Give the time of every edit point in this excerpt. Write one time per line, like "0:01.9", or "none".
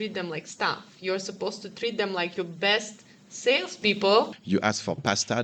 0:04.4

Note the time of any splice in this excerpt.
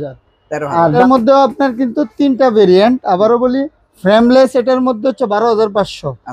0:00.9

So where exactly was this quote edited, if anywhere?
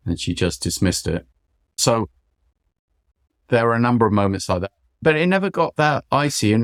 none

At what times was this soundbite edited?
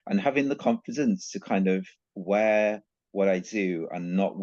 none

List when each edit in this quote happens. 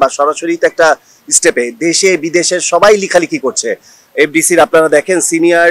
none

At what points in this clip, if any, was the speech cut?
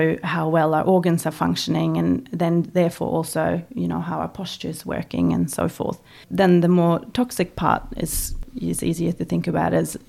0:06.2
0:08.3

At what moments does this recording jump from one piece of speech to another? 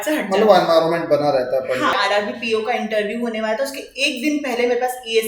0:02.0

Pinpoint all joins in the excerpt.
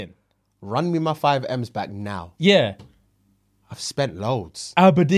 none

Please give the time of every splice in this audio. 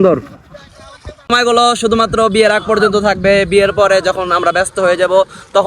0:01.3

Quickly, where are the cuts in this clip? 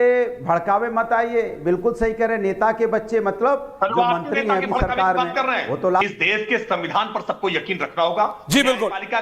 0:05.9

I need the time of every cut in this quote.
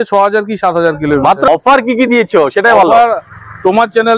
0:01.5

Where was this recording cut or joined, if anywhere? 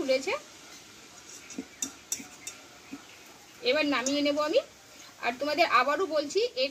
none

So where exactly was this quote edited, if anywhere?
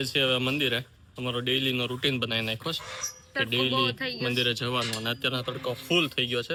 none

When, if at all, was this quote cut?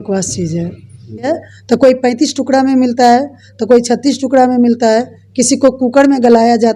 0:01.3

